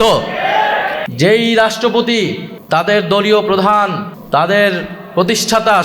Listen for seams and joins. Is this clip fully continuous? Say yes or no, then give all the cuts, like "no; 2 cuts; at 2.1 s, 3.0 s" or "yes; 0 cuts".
no; 3 cuts; at 1.0 s, 2.5 s, 4.1 s